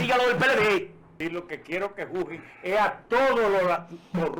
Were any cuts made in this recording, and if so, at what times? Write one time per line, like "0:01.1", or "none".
0:01.1